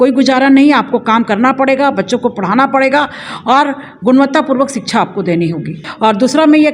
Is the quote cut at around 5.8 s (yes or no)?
yes